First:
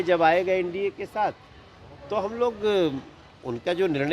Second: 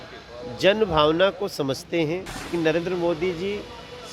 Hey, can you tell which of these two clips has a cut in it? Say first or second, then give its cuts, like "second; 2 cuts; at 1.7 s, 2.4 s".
second; 1 cut; at 2.5 s